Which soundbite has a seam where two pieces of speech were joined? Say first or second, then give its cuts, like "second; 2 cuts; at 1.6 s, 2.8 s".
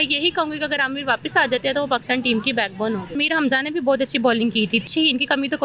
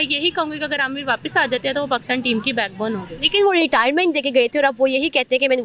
first; 2 cuts; at 3.2 s, 4.8 s